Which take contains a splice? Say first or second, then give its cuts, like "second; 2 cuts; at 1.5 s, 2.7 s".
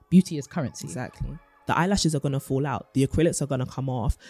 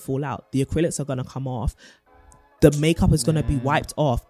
first; 1 cut; at 1.5 s